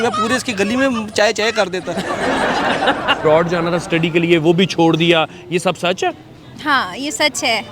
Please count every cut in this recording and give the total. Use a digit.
1